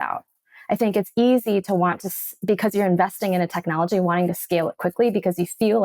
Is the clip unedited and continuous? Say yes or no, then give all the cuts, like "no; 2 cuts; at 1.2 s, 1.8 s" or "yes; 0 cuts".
yes; 0 cuts